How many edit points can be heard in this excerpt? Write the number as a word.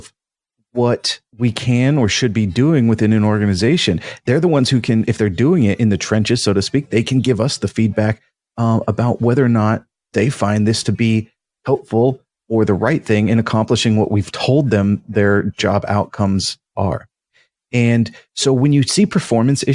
one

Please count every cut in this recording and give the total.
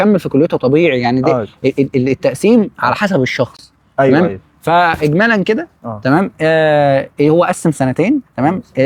zero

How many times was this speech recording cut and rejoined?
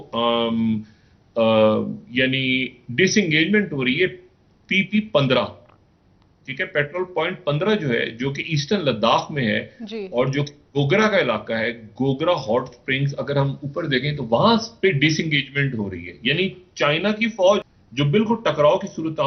one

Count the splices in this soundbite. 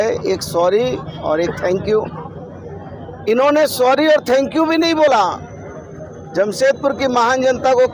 zero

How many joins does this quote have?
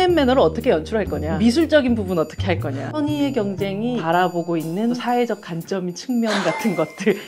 four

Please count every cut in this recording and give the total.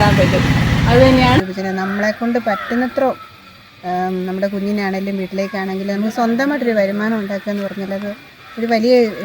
one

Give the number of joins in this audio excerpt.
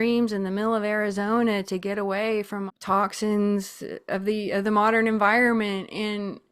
one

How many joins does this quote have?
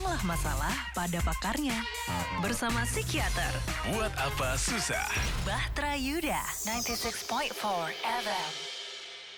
zero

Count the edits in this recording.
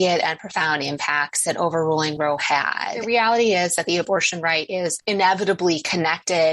two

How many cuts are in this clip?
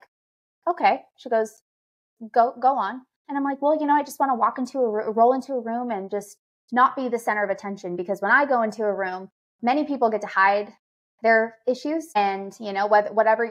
one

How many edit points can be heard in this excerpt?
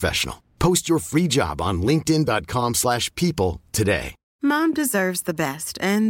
one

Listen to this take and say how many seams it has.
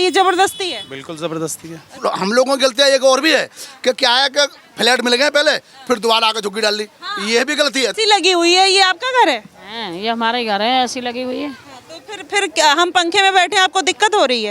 two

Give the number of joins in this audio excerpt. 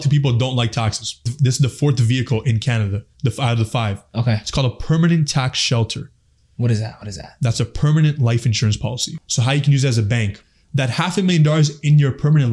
three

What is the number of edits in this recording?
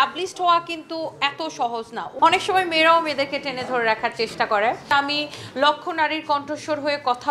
two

